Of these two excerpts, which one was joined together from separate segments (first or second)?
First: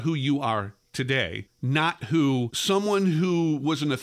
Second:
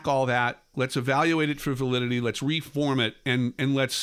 first